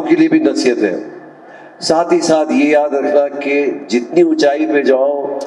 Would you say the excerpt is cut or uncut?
uncut